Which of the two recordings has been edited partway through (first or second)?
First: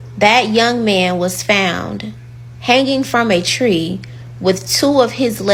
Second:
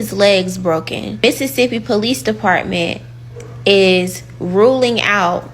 second